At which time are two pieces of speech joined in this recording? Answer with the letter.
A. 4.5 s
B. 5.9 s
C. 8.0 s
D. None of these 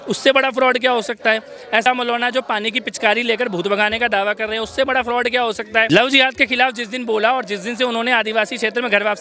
B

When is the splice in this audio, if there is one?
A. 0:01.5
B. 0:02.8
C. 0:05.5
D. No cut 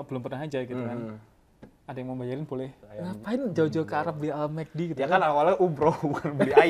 B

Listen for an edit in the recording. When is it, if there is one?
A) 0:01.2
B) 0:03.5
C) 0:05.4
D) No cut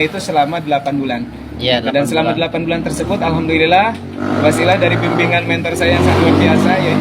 D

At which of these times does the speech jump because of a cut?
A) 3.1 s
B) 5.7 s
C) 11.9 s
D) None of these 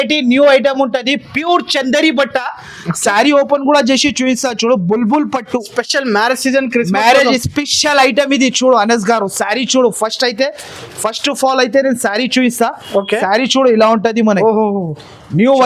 D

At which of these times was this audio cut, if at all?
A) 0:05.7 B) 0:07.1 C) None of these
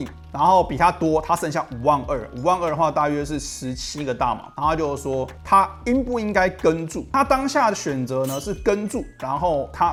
C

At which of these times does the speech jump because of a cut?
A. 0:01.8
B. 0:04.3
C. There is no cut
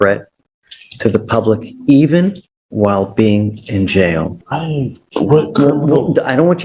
B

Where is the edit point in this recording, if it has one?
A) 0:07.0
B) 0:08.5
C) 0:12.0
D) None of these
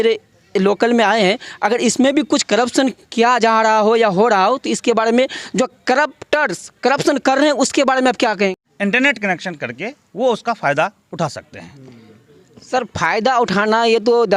B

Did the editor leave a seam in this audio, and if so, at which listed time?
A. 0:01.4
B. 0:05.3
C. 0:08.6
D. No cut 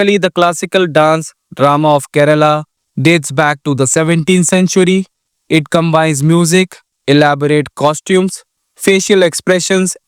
D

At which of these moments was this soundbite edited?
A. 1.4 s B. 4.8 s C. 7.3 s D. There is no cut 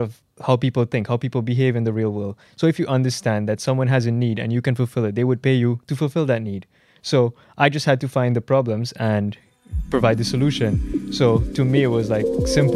D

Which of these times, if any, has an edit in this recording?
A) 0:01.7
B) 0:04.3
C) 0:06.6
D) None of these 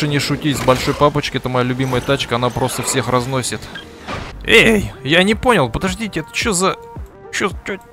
B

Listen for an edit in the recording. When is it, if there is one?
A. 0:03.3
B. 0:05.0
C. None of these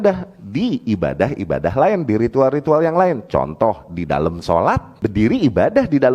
B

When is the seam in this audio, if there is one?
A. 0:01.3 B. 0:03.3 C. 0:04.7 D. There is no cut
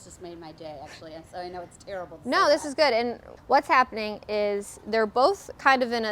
B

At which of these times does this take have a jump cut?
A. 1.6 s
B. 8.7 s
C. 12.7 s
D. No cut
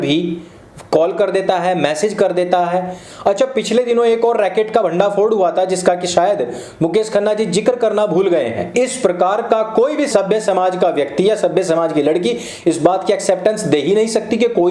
B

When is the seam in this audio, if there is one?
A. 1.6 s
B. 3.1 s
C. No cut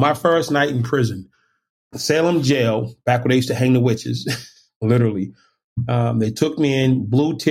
A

